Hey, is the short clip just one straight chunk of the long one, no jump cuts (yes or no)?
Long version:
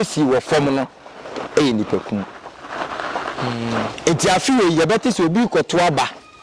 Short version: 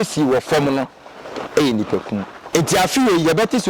no